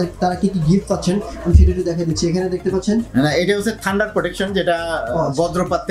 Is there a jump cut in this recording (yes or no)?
no